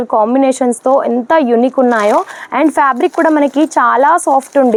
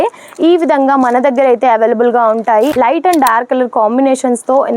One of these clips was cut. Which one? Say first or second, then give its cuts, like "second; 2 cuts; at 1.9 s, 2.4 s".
second; 1 cut; at 2.7 s